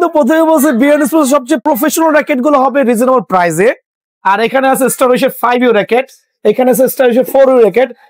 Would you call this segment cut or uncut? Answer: cut